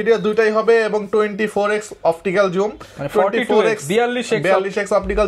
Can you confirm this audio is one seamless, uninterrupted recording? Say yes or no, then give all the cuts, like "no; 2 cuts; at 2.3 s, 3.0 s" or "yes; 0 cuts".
yes; 0 cuts